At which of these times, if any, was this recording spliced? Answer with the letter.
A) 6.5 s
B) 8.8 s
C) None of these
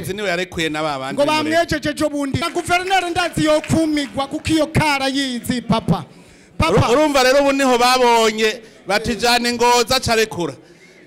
C